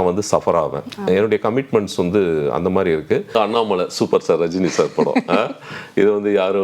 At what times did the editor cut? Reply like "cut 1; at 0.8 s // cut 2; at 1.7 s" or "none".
cut 1; at 3.3 s